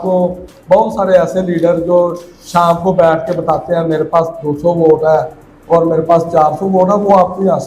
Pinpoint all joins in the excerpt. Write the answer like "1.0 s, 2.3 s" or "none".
none